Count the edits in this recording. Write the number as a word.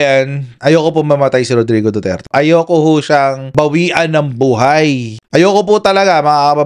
one